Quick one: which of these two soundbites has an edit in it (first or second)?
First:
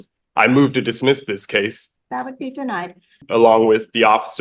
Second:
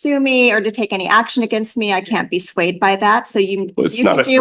first